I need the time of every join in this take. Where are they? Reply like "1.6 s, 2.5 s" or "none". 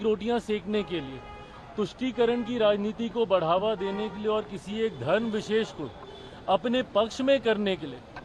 none

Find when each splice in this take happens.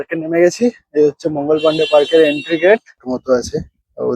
3.1 s

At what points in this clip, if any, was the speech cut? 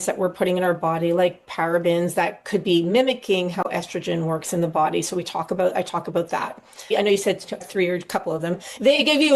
none

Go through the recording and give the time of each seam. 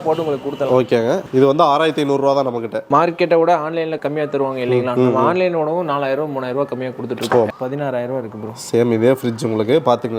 2.8 s, 4.0 s, 7.5 s

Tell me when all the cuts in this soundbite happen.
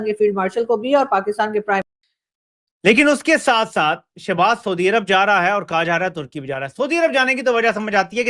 1.9 s

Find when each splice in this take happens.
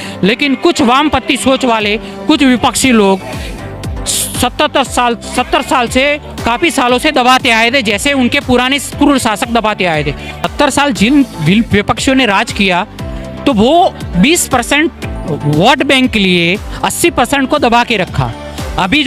10.3 s

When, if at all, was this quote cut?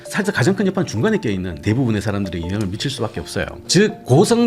1.6 s, 3.6 s

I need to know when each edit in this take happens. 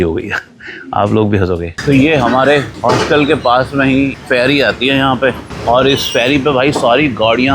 1.7 s, 2.7 s, 4.1 s, 5.5 s

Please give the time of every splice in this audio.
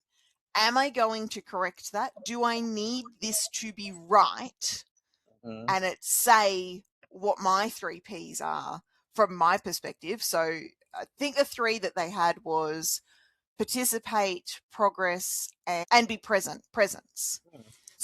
15.8 s

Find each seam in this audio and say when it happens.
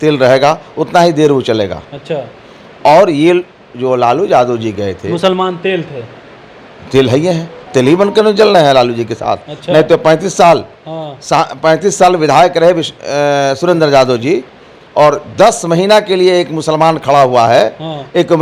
none

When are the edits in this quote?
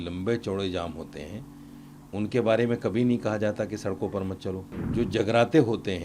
4.7 s

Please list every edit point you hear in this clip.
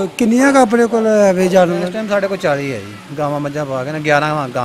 none

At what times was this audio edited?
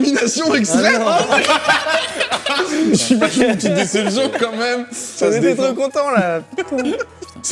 2.9 s, 5.1 s

